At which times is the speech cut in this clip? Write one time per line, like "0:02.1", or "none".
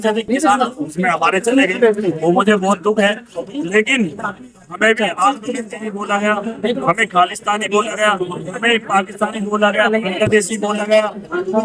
none